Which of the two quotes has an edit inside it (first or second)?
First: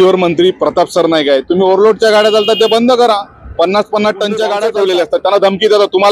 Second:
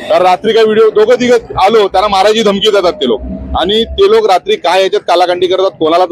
first